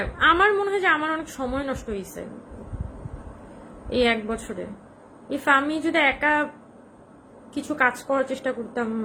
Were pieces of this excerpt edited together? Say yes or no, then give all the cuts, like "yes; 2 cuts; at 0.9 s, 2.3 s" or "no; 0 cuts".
no; 0 cuts